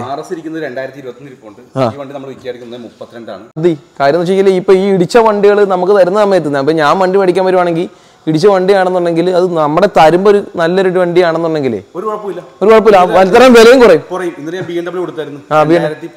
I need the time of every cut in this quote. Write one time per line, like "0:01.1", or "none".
0:03.6